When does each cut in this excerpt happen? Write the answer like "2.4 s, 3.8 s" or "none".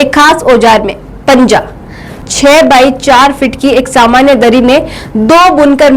2.2 s